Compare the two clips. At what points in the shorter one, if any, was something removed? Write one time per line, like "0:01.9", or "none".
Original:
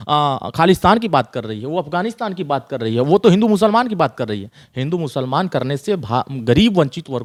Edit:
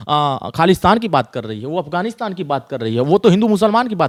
none